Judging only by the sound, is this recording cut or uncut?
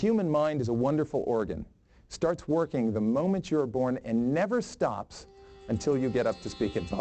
uncut